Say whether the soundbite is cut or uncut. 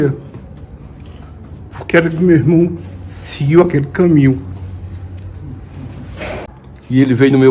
cut